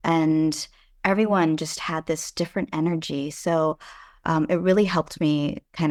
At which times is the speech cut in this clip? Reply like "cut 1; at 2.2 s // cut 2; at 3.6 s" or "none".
none